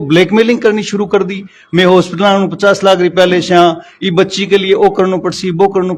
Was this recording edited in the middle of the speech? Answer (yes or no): no